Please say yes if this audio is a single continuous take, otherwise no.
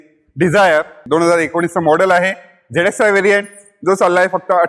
no